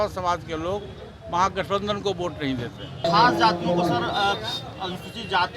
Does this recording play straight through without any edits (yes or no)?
no